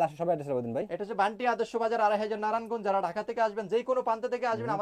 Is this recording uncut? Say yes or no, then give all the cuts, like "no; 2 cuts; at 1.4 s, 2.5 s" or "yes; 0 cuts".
yes; 0 cuts